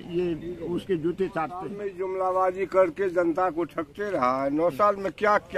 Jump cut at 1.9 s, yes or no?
yes